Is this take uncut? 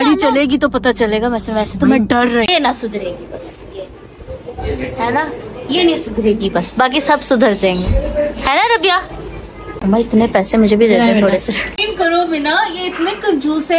no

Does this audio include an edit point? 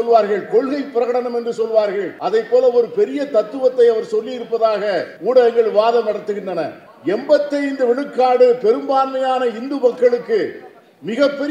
yes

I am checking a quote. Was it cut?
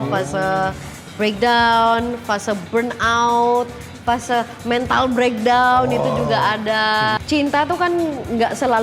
yes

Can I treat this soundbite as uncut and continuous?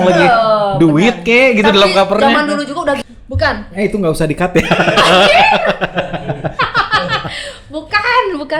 no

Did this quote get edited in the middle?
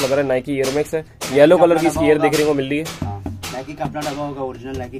no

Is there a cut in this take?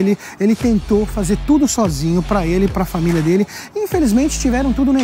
no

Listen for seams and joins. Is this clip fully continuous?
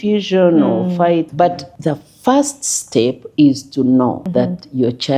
no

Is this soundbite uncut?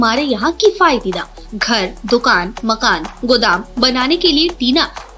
yes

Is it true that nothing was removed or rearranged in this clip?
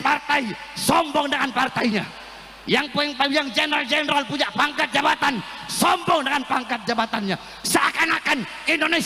yes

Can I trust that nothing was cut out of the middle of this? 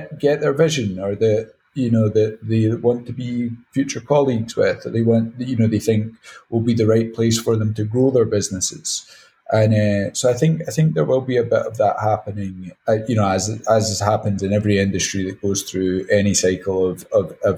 yes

